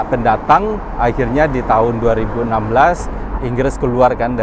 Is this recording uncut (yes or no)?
yes